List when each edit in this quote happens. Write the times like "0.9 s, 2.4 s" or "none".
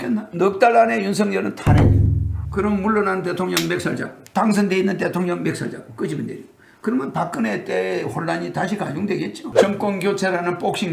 none